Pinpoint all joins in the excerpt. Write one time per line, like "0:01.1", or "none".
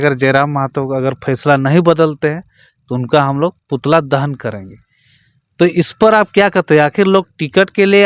none

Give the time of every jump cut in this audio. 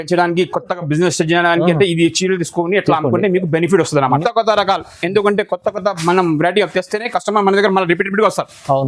0:04.2

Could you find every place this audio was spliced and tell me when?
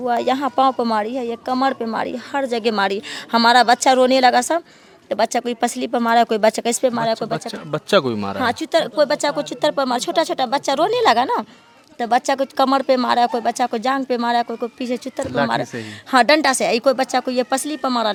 none

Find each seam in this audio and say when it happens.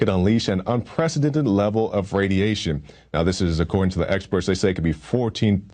0:04.1

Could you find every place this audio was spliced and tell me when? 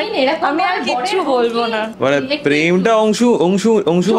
0:01.9

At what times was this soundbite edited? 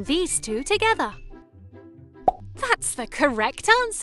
0:01.3

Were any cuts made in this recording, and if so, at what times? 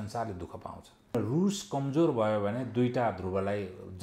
0:01.1

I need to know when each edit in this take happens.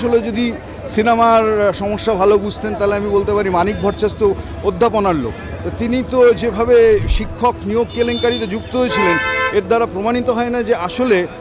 none

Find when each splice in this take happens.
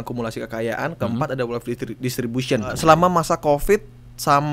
0:02.8

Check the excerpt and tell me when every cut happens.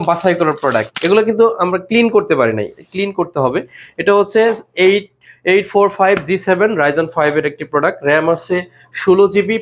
0:00.9

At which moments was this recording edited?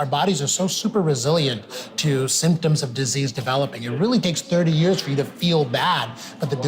none

